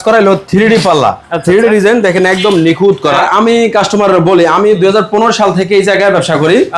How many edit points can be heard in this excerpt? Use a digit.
1